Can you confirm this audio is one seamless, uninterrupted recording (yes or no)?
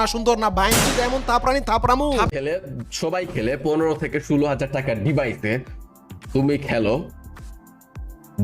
no